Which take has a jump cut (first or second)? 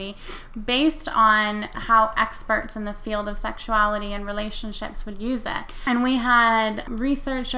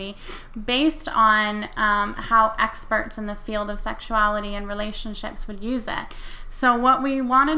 first